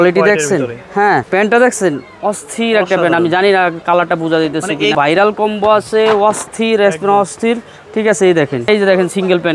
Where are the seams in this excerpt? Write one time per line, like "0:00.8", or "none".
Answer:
0:01.3
0:04.9
0:08.7